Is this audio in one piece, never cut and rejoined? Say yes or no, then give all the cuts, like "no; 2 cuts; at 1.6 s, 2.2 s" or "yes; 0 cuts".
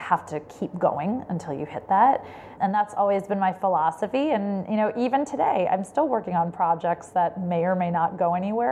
no; 1 cut; at 2.5 s